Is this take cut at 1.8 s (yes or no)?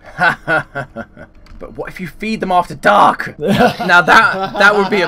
no